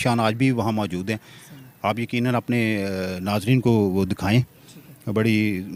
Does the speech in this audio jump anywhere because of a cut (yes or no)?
no